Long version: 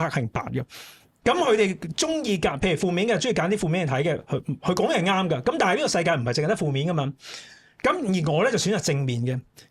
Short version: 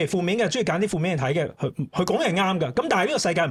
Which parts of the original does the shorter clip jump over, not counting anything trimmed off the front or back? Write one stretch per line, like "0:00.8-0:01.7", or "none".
none